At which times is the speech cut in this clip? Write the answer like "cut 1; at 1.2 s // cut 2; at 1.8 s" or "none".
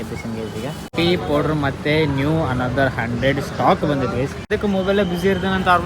cut 1; at 0.9 s // cut 2; at 4.5 s